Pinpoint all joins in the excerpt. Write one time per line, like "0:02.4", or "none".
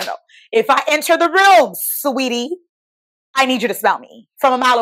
none

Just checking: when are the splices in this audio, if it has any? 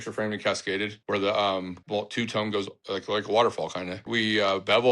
0:01.0
0:01.8
0:02.8
0:04.1

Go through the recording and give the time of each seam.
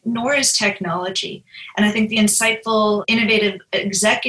0:03.0

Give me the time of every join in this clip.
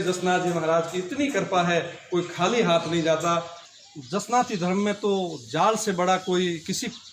0:03.6

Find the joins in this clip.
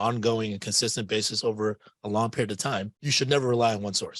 0:03.0

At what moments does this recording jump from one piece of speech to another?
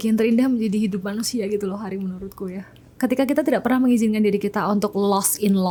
none

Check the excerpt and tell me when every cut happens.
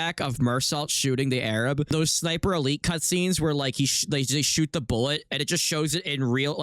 0:01.9

